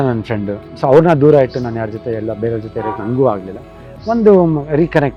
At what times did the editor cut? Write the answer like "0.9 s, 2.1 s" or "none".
none